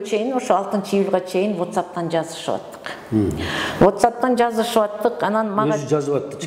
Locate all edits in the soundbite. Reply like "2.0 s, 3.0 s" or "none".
none